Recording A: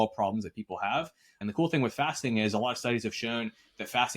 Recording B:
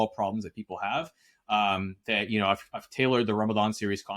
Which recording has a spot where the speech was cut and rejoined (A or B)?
A